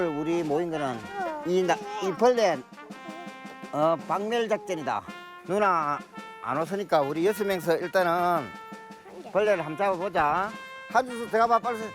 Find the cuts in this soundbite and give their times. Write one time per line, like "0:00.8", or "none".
0:01.1

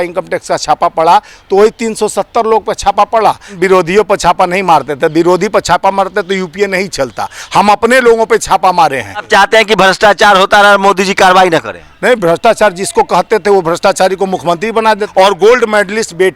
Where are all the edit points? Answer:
0:03.5
0:09.3
0:15.1

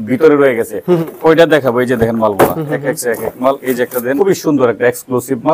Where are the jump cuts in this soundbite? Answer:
0:01.1
0:04.2

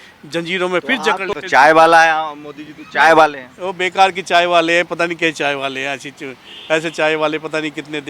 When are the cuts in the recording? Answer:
0:01.3

